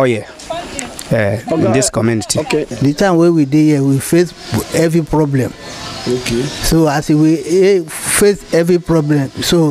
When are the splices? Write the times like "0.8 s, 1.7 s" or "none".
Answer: 2.7 s